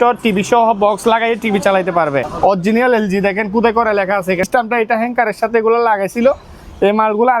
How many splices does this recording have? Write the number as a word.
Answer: two